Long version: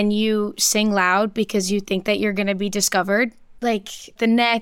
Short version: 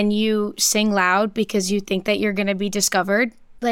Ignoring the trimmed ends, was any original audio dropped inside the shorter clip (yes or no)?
no